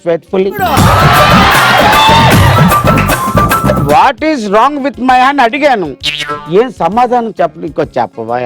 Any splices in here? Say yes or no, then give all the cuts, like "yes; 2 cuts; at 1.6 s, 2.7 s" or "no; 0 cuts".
yes; 1 cut; at 3.8 s